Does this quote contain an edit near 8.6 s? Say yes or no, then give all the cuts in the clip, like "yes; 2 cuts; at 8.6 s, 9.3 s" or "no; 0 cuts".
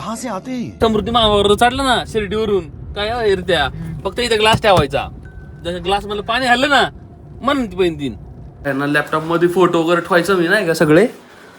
yes; 2 cuts; at 0.8 s, 8.6 s